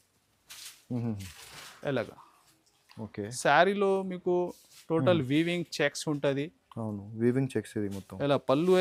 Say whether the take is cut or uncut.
uncut